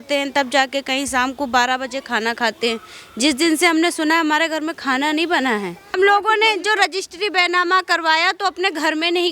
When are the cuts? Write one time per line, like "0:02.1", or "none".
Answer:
0:05.9